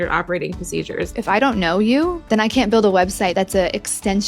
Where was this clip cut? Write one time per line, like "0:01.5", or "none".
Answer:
0:01.2
0:02.2
0:03.3